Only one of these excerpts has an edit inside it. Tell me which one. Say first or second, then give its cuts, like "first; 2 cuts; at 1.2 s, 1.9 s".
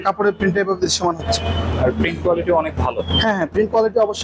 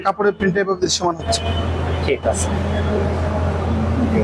first; 1 cut; at 1.7 s